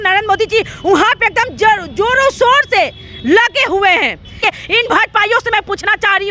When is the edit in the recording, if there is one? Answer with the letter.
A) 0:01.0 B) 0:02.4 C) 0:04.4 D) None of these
C